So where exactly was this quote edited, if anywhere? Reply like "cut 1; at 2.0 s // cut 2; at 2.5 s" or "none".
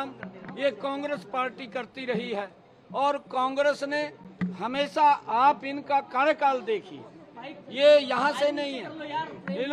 none